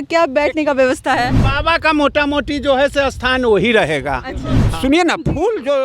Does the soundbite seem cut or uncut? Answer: cut